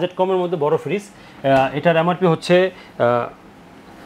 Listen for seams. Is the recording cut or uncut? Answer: uncut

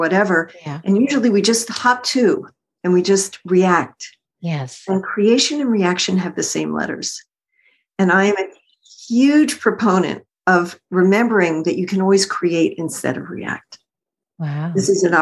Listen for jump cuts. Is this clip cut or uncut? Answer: uncut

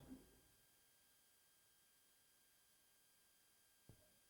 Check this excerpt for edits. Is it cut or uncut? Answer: uncut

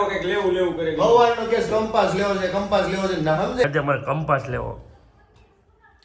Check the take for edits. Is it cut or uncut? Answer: cut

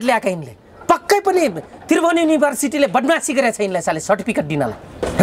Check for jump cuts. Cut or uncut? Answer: uncut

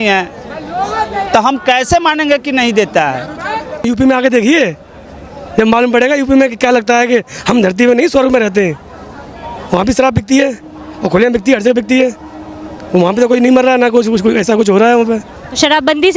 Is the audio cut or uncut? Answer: cut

